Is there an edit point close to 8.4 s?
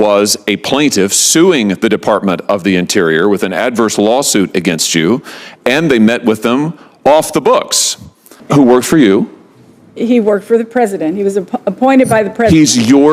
yes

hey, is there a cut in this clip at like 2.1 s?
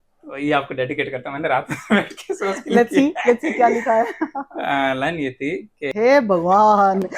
no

